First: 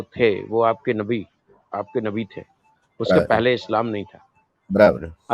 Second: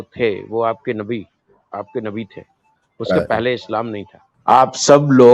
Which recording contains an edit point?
second; 1 cut; at 4.2 s

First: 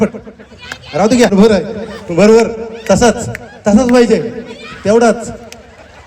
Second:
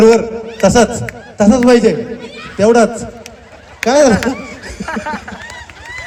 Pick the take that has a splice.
first; 1 cut; at 1.3 s

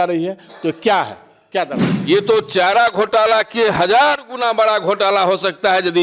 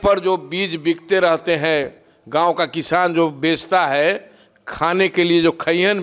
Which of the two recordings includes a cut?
first; 1 cut; at 1.9 s

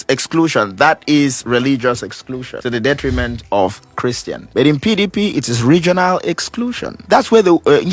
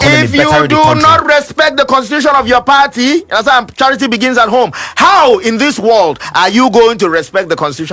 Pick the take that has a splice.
first; 3 cuts; at 2.5 s, 4.3 s, 7.0 s

